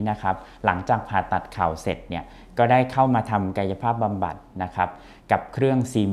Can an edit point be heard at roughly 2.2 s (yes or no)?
no